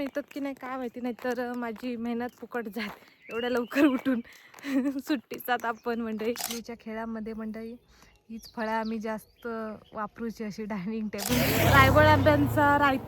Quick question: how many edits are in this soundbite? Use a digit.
2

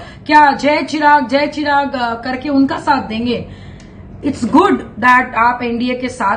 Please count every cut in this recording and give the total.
0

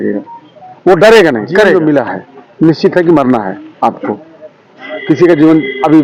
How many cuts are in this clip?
0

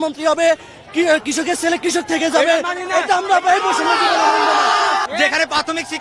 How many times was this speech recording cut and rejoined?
1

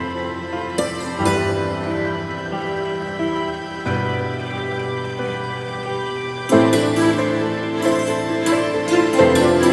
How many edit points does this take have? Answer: 0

